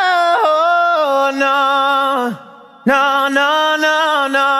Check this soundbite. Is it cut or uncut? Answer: uncut